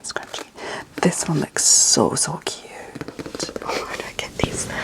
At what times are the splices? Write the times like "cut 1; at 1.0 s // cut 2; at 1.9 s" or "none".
cut 1; at 3.6 s